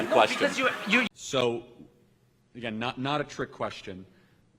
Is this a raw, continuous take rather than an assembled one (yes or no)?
no